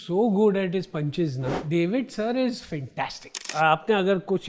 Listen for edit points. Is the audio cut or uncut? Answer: cut